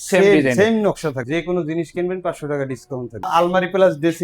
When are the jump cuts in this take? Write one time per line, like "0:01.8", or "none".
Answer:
0:01.1
0:03.3